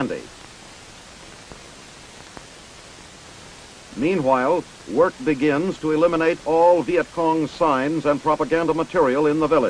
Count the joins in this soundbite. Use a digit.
0